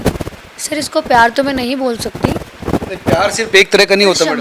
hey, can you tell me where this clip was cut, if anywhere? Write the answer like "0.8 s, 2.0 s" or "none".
none

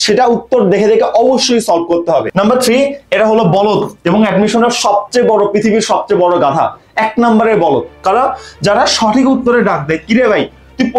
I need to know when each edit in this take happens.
2.3 s

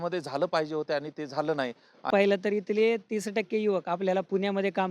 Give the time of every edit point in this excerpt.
2.1 s

